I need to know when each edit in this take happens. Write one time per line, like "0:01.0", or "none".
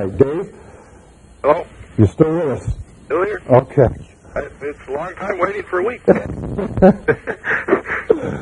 0:06.5